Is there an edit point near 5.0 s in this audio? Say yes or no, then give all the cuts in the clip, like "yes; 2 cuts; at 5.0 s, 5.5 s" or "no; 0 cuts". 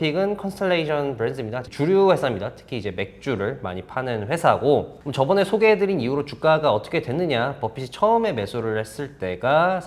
yes; 2 cuts; at 1.6 s, 5.0 s